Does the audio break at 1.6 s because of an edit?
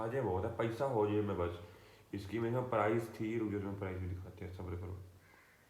no; 0 cuts

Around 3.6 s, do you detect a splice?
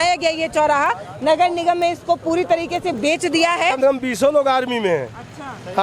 yes; 1 cut; at 3.6 s

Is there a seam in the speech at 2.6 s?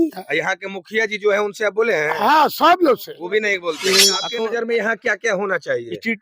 no; 1 cut; at 4.3 s

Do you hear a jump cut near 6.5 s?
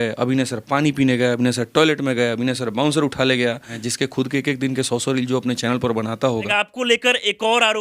yes; 2 cuts; at 3.7 s, 6.5 s

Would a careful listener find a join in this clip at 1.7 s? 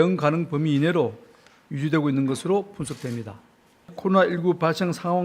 no; 1 cut; at 3.9 s

